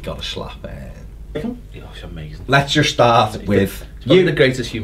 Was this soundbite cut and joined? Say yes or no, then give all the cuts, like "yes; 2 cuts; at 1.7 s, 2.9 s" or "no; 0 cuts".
no; 0 cuts